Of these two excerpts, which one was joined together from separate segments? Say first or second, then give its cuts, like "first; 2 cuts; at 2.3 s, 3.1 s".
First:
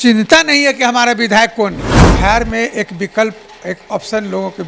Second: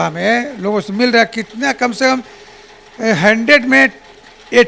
first; 1 cut; at 1.9 s